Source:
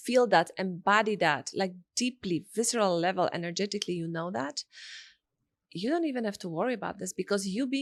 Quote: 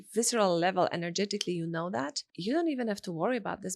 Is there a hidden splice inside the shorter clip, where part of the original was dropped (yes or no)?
yes